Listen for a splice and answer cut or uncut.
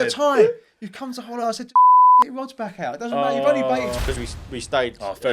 cut